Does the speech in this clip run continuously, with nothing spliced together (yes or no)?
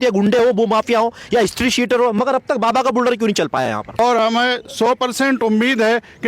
no